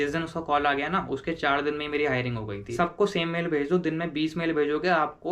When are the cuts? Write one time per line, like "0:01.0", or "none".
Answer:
0:02.6